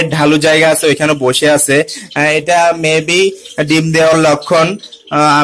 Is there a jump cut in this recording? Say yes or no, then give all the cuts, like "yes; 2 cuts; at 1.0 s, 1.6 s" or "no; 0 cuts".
no; 0 cuts